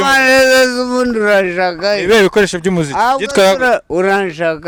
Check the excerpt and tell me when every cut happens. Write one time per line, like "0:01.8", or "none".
none

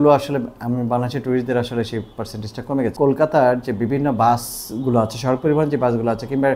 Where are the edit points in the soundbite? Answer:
0:02.9

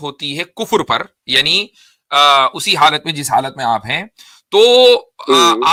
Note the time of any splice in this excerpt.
none

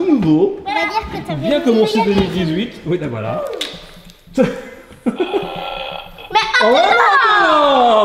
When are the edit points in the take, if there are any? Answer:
none

